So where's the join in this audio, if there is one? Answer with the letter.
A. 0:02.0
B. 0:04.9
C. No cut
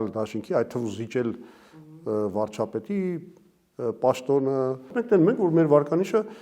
B